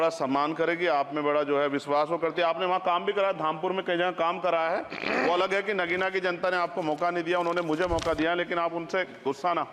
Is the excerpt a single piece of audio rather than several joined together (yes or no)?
yes